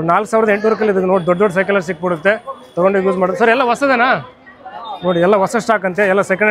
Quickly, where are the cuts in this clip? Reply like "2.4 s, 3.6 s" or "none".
none

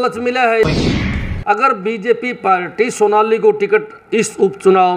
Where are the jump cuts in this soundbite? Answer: 1.1 s

